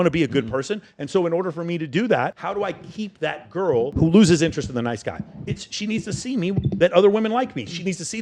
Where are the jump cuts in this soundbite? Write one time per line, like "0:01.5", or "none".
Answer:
0:02.3
0:03.9